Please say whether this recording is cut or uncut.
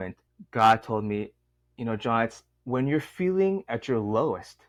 uncut